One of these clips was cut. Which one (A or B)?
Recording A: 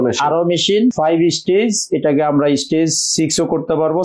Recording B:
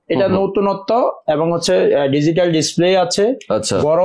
A